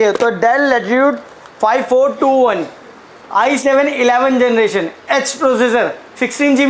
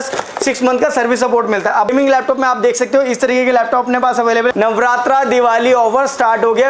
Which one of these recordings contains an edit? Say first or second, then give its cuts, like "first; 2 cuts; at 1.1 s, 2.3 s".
second; 2 cuts; at 1.9 s, 4.5 s